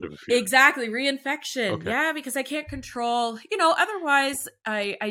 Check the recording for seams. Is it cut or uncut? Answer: uncut